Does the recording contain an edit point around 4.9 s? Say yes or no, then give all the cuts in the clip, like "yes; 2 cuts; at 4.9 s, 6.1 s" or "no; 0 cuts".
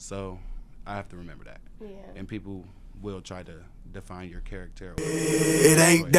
yes; 1 cut; at 4.9 s